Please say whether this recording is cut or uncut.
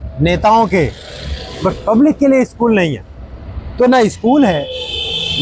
uncut